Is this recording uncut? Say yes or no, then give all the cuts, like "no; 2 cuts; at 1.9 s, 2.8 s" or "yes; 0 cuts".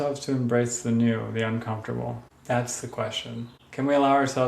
no; 2 cuts; at 2.3 s, 3.6 s